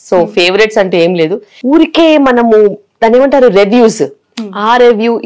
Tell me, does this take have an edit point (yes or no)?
yes